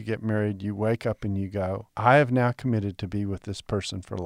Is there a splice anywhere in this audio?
yes; 1 cut; at 1.9 s

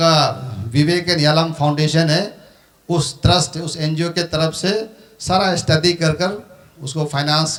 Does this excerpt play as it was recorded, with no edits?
yes; 0 cuts

